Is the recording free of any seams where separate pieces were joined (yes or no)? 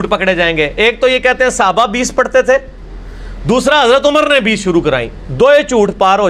yes